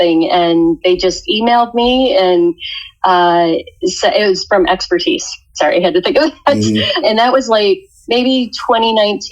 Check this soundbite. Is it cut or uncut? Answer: cut